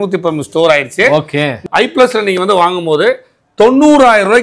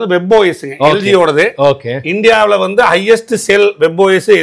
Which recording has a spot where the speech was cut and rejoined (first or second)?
first